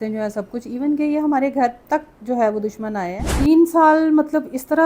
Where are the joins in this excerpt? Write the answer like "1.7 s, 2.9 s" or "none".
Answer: 3.4 s